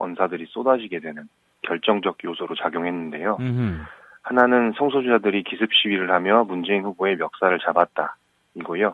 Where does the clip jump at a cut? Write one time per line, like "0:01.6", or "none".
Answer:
0:07.4